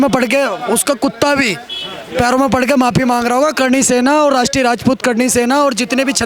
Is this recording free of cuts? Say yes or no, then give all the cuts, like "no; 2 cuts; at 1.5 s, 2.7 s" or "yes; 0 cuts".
yes; 0 cuts